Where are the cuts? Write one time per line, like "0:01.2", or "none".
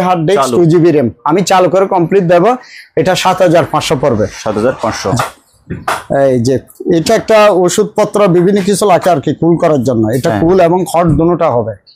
0:05.2